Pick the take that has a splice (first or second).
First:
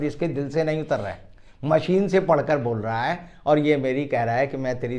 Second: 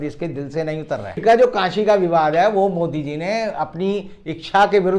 second